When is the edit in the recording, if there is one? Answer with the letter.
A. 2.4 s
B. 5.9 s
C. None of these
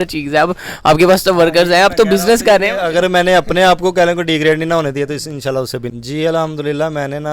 B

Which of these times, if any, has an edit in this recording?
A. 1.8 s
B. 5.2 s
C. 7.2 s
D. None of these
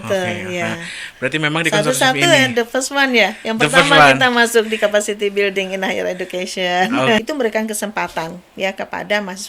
C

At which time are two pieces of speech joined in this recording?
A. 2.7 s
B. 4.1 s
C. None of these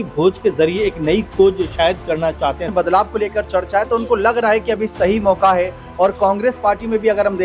A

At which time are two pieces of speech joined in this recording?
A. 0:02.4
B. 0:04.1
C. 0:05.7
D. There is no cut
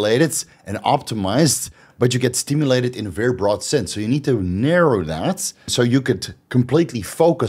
C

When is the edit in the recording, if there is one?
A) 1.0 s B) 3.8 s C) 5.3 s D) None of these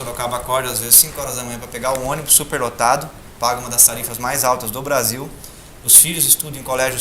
C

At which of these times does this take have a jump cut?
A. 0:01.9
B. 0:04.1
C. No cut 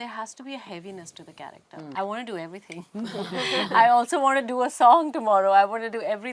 A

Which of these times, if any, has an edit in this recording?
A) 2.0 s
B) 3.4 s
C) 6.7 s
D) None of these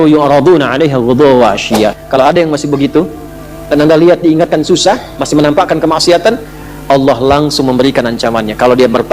A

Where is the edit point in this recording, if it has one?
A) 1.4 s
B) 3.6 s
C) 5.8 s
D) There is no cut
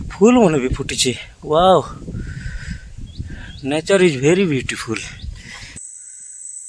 C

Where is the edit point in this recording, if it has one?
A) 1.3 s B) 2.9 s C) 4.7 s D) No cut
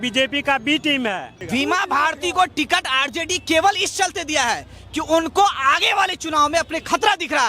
A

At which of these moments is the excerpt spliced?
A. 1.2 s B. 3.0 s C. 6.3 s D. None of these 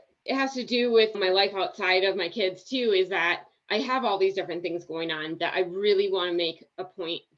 A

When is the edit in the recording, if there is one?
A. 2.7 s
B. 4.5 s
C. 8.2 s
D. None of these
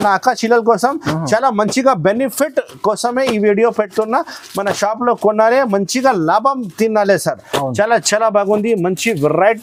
D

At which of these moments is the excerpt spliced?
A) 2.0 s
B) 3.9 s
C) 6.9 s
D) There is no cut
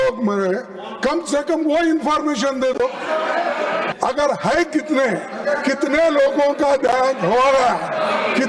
B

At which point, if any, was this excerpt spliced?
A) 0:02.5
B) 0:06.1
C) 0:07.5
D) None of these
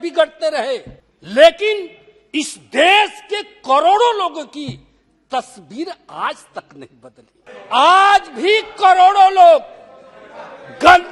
C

